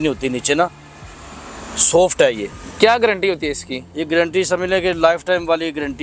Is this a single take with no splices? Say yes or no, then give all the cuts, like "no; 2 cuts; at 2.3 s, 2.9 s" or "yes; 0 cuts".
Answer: yes; 0 cuts